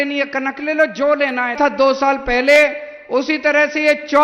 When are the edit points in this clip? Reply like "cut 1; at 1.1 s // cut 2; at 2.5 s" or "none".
cut 1; at 1.6 s

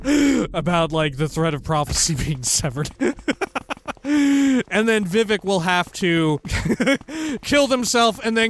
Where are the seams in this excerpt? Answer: cut 1; at 6.5 s

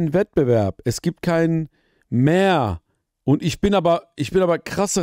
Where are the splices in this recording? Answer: none

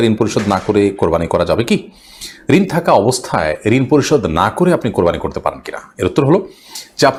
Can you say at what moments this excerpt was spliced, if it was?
none

